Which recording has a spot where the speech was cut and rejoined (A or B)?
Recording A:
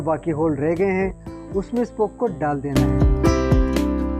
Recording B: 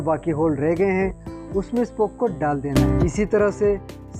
B